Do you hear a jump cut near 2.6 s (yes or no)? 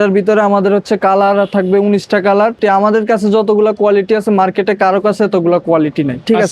yes